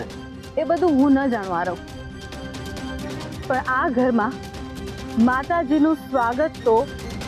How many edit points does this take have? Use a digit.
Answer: 2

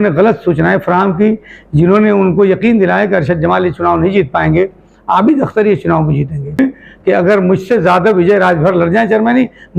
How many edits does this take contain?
1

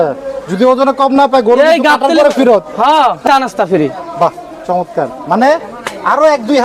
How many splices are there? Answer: 1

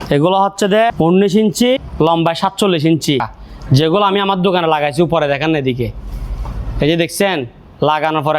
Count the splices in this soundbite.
3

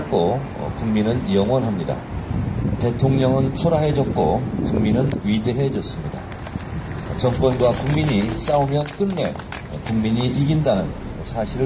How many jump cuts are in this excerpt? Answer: 1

